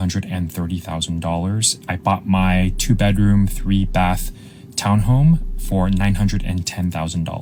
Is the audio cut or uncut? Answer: uncut